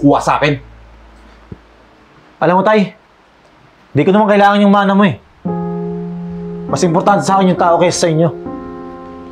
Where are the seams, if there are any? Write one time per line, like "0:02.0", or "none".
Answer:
none

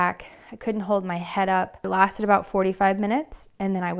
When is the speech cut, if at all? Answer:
none

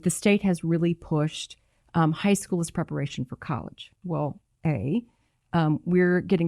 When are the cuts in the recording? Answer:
0:03.9

